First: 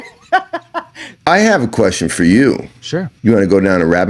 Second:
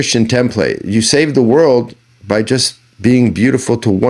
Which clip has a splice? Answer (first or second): first